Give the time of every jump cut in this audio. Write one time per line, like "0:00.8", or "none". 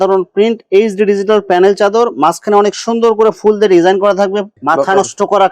0:04.5